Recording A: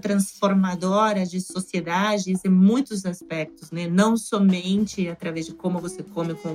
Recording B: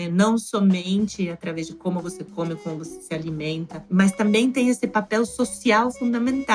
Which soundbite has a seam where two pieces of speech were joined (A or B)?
B